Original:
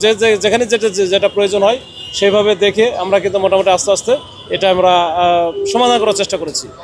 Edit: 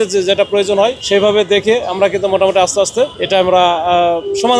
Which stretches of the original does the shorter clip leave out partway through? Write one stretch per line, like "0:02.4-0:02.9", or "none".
0:01.8-0:02.1
0:04.3-0:04.5